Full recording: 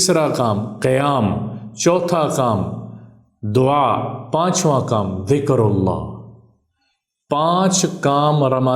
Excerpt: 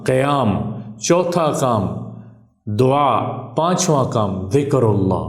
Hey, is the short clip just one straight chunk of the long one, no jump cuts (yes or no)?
yes